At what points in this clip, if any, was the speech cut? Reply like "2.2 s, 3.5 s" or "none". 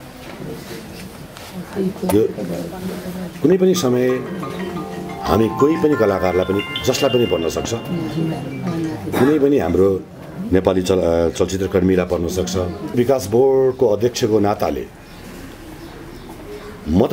13.0 s